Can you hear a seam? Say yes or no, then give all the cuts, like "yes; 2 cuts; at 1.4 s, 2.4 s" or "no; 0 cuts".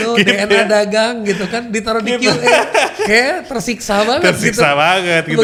no; 0 cuts